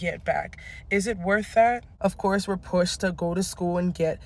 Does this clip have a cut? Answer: yes; 1 cut; at 1.9 s

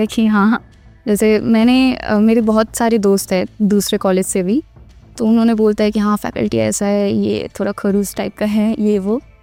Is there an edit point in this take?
no; 0 cuts

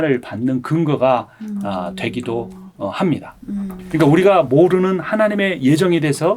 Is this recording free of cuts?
no; 1 cut; at 3.8 s

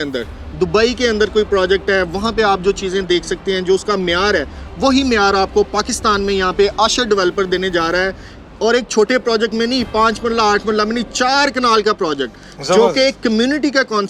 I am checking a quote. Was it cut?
no; 0 cuts

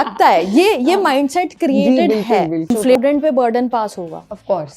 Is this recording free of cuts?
no; 1 cut; at 2.9 s

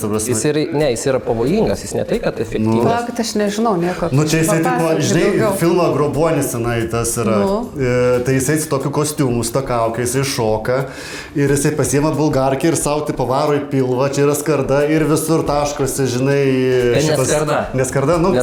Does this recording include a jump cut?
no; 0 cuts

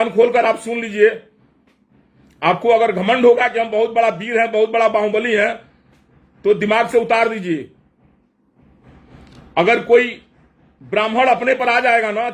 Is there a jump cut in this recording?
no; 0 cuts

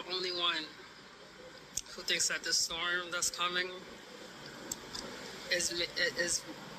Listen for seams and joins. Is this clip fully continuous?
yes; 0 cuts

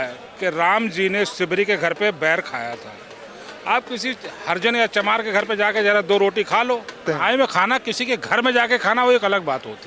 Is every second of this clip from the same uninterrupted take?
no; 1 cut; at 7.0 s

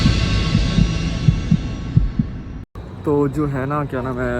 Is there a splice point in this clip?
yes; 1 cut; at 2.9 s

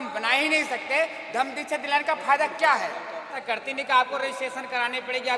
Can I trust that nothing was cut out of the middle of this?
no; 1 cut; at 3.3 s

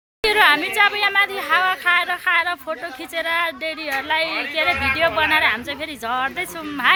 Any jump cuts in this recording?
no; 0 cuts

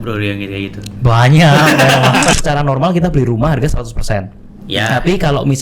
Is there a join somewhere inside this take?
yes; 1 cut; at 2.3 s

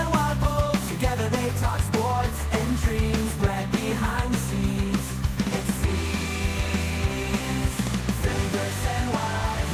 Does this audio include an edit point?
no; 0 cuts

